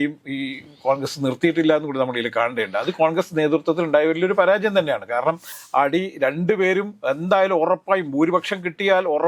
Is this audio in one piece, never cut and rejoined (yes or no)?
no